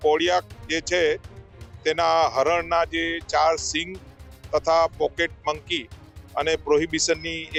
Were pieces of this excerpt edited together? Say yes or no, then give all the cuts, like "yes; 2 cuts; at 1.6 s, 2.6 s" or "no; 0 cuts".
no; 0 cuts